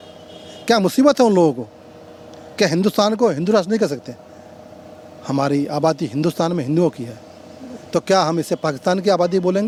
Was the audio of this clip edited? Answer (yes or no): no